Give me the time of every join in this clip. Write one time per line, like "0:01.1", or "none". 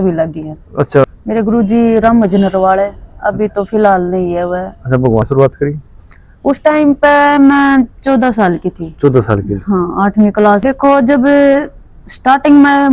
0:01.0
0:05.2
0:10.6